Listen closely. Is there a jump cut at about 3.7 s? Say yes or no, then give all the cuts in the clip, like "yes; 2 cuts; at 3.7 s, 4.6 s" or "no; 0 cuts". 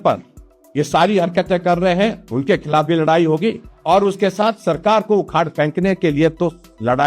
yes; 1 cut; at 3.7 s